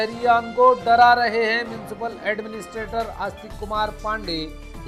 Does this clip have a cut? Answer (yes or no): no